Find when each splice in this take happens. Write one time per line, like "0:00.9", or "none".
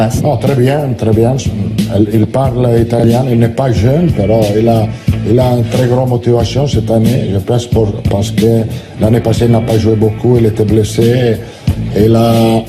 0:05.6